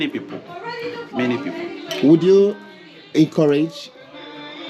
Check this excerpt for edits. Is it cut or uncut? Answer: uncut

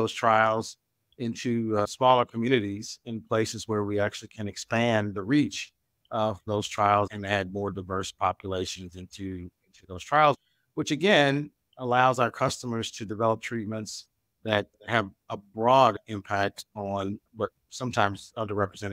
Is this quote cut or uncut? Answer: cut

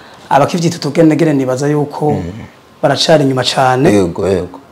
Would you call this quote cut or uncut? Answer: uncut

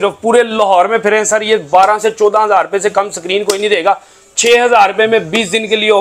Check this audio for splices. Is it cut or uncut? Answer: uncut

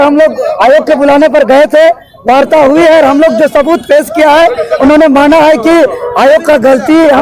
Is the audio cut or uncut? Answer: uncut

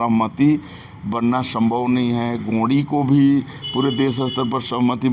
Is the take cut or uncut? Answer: uncut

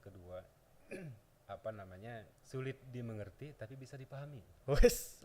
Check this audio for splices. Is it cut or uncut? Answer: cut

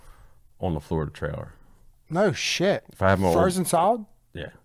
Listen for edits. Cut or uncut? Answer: uncut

